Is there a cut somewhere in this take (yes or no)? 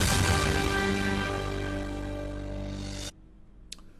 yes